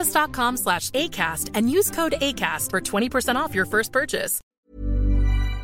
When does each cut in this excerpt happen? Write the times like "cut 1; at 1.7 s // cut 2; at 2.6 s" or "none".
cut 1; at 4.4 s